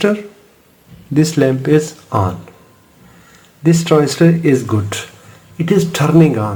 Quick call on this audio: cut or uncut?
uncut